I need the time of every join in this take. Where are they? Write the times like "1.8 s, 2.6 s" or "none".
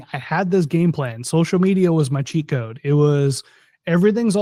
none